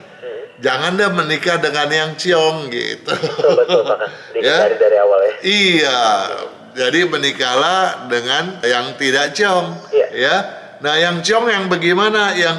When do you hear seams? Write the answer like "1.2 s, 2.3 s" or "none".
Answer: none